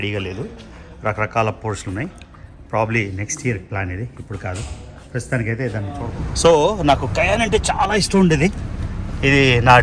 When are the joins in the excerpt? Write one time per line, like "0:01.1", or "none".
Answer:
0:06.0